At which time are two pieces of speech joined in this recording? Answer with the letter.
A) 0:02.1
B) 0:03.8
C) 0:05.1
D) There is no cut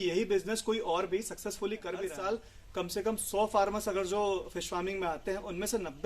A